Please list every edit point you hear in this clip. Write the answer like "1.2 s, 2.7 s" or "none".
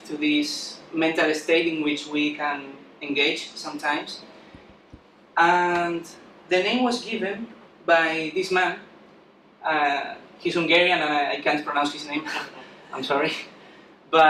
none